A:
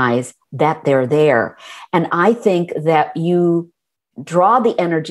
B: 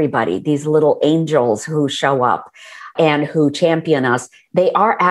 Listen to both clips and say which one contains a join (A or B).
B